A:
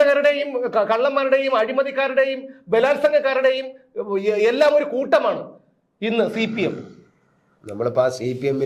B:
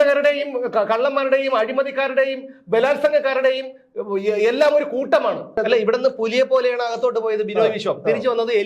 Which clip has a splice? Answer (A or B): B